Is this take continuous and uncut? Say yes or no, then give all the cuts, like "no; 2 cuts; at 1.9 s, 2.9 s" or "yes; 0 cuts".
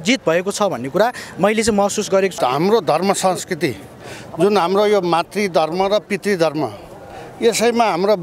no; 1 cut; at 2.3 s